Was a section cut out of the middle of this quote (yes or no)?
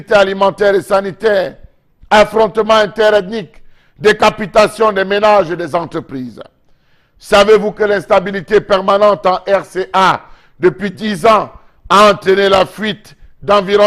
no